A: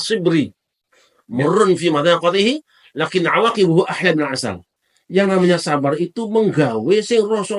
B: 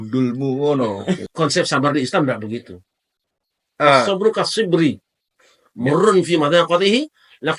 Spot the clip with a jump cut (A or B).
B